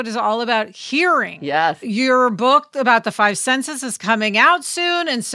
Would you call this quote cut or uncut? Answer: uncut